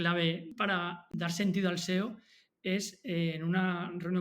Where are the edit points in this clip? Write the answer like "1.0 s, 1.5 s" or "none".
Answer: 1.0 s